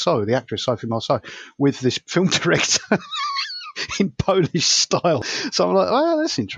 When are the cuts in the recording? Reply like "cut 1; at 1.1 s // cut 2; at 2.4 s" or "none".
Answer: cut 1; at 5.2 s

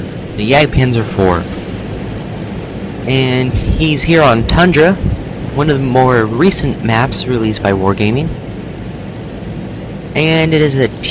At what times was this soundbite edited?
cut 1; at 3.0 s

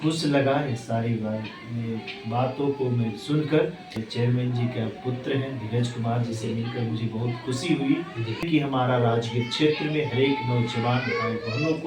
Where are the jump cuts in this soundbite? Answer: cut 1; at 4.0 s // cut 2; at 8.5 s

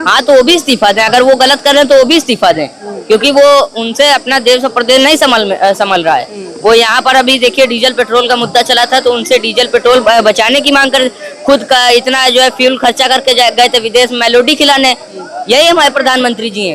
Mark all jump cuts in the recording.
none

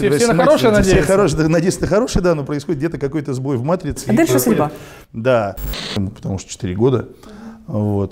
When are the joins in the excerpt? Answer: cut 1; at 5.9 s

